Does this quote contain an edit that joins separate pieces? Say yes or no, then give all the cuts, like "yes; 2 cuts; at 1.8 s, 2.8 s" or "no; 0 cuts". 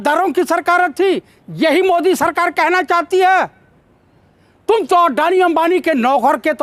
no; 0 cuts